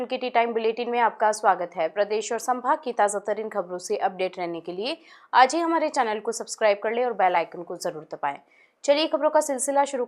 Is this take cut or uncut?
uncut